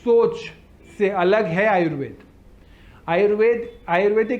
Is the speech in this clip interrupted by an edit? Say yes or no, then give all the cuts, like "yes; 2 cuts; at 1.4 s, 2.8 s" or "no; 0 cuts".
no; 0 cuts